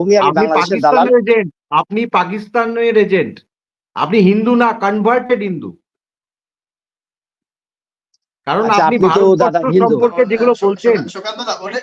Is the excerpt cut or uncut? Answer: uncut